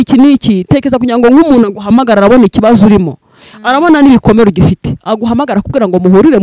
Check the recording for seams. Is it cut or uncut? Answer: uncut